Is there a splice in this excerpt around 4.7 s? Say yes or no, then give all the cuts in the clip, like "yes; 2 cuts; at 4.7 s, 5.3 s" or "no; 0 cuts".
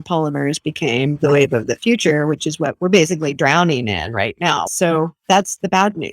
yes; 1 cut; at 4.7 s